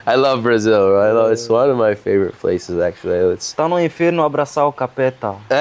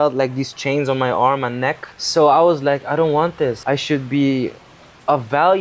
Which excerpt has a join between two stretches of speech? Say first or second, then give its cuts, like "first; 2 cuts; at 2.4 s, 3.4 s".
second; 2 cuts; at 1.9 s, 3.6 s